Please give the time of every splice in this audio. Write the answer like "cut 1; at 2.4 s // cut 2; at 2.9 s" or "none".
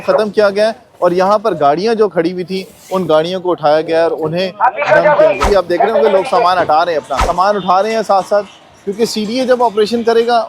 cut 1; at 5.4 s // cut 2; at 7.2 s